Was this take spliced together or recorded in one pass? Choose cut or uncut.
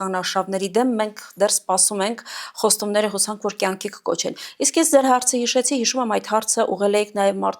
uncut